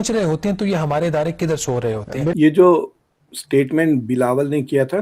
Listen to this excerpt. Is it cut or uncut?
cut